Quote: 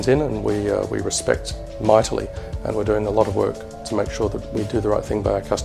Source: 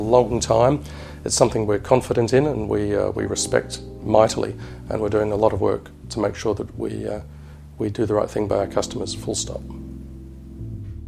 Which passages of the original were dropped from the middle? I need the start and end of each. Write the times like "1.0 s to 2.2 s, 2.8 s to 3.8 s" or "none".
6.7 s to 7.7 s